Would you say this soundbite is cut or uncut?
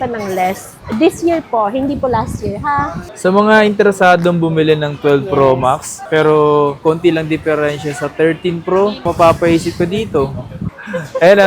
cut